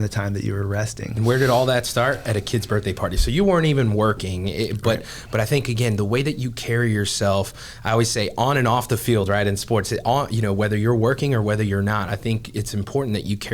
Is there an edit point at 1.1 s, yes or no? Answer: yes